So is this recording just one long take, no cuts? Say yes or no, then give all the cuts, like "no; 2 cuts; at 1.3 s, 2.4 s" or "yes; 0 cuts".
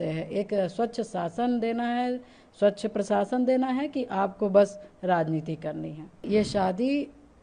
no; 1 cut; at 6.3 s